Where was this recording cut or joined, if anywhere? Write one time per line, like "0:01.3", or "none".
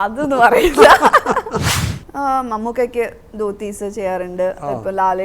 0:01.8